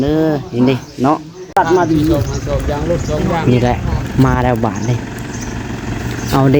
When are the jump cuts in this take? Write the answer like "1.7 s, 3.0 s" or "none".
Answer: 1.4 s